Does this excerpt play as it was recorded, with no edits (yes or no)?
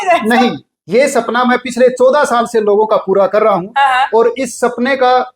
yes